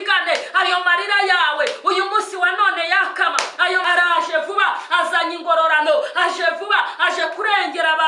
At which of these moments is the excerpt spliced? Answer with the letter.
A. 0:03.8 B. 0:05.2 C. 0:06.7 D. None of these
A